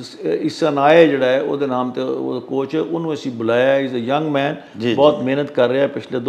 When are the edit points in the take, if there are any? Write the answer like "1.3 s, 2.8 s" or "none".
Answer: none